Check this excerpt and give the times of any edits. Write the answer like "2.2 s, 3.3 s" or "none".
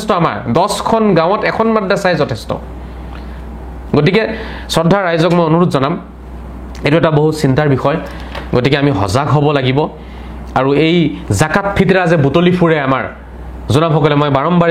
none